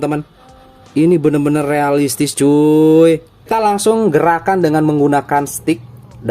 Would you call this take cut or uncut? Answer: cut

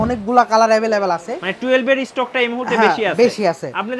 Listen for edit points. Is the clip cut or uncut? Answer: uncut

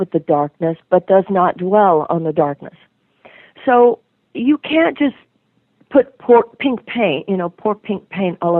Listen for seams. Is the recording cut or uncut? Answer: uncut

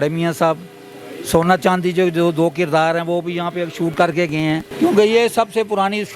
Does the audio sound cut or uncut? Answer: uncut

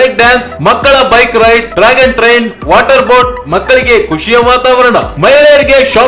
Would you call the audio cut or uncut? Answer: uncut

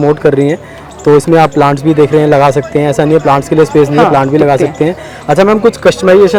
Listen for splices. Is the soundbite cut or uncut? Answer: uncut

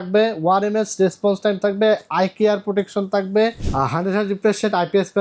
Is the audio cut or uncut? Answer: cut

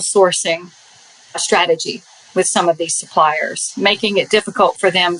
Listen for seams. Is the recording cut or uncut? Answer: cut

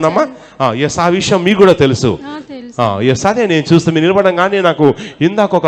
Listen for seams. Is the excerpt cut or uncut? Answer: uncut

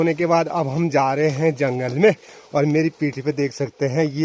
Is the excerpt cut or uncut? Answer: uncut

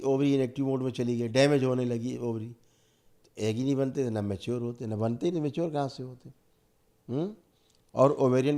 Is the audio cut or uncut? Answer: uncut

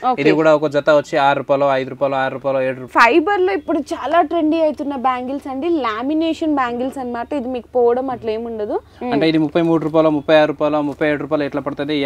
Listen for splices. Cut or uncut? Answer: cut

